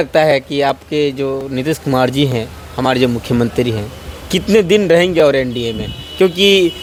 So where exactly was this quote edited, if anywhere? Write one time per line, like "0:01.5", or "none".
none